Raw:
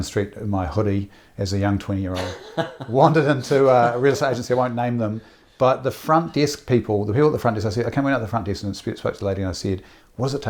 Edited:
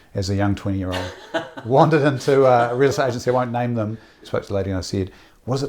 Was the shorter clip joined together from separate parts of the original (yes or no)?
yes